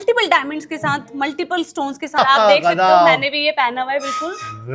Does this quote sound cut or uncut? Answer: cut